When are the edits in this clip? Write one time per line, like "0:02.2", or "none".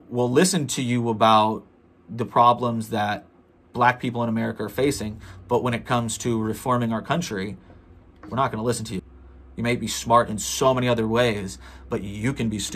0:09.0